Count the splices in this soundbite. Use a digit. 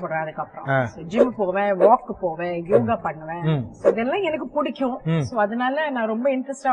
0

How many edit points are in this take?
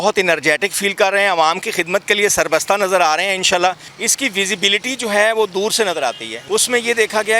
2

